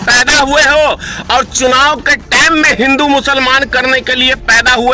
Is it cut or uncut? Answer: uncut